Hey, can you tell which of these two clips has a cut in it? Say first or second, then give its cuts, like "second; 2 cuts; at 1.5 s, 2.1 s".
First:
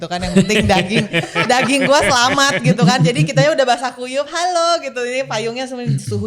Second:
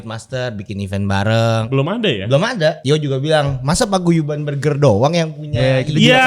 second; 2 cuts; at 1.7 s, 2.8 s